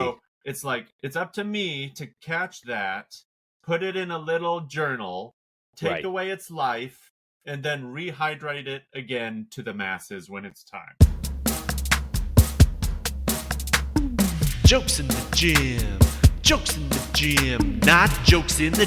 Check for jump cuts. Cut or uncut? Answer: cut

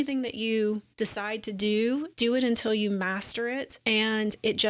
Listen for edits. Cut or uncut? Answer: cut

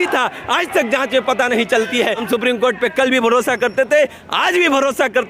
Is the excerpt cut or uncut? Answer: cut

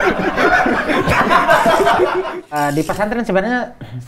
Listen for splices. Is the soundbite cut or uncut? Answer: cut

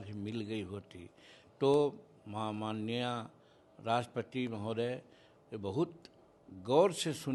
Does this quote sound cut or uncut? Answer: uncut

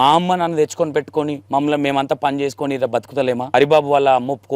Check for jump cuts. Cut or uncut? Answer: cut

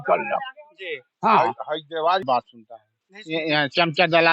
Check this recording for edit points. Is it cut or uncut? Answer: cut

